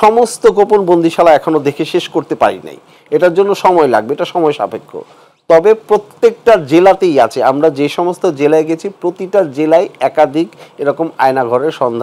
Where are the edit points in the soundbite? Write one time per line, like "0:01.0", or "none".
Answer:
none